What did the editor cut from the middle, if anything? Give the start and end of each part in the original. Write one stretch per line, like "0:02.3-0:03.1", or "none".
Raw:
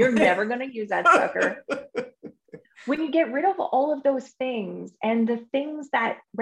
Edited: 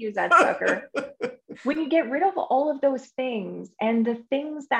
0:02.2-0:02.7

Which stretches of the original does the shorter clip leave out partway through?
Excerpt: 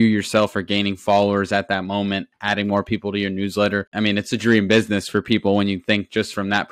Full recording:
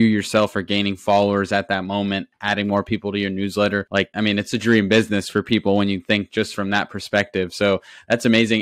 0:03.9-0:04.1

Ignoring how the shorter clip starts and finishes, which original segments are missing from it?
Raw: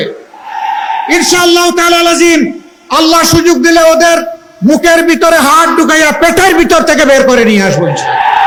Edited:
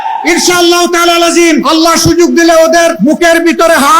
0:02.5-0:02.9
0:04.2-0:04.6

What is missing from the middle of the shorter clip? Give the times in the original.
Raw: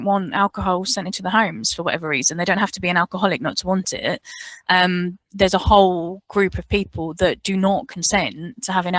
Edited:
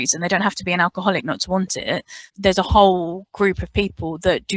0:04.4-0:05.2

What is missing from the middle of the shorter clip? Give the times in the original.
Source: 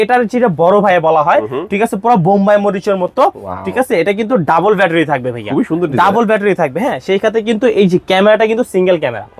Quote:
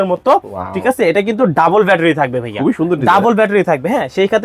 none

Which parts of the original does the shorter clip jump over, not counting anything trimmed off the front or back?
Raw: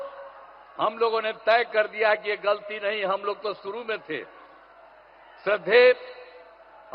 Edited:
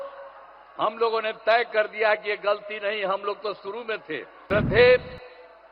0:04.3-0:05.3

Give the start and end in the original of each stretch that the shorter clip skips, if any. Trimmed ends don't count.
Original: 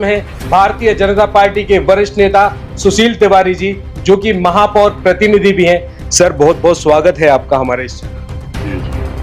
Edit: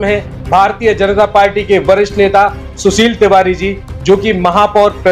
none

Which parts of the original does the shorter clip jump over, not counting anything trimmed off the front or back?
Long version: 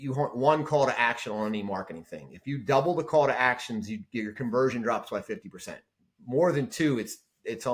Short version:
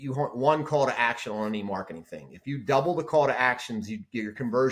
none

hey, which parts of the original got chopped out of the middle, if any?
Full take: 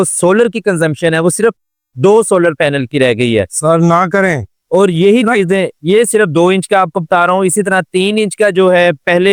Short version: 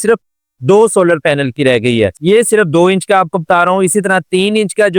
0:03.5-0:05.8

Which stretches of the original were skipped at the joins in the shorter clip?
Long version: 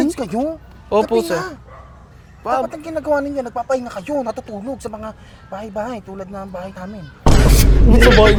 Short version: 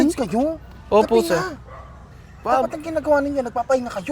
none

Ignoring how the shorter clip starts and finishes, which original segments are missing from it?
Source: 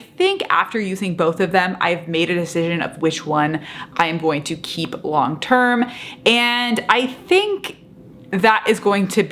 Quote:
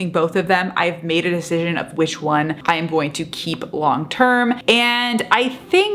0:03.6-0:03.9
0:05.9-0:06.2

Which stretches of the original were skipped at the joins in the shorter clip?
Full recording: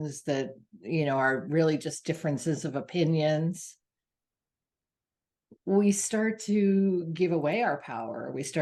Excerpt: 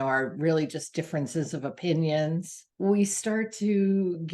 0:03.7-0:05.5

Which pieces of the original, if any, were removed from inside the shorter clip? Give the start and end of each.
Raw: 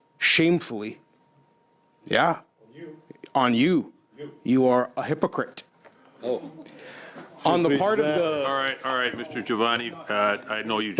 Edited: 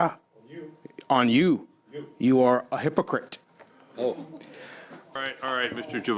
0:07.4-0:08.5

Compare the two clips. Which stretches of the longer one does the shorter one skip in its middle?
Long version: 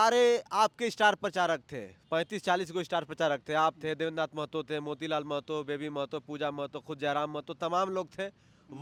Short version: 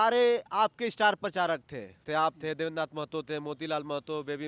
0:02.0-0:03.4

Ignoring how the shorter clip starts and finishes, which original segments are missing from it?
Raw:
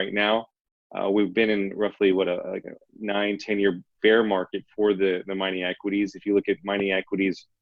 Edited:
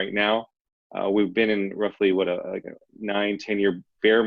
none

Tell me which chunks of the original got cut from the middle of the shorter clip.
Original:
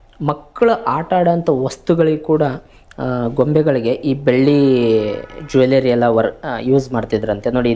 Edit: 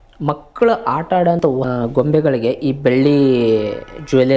0:01.4-0:02.8

